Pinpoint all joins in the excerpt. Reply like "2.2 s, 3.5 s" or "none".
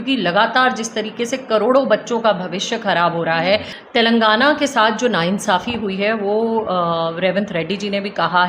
3.8 s